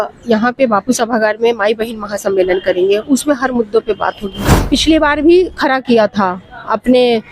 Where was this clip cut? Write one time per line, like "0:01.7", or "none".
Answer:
0:04.5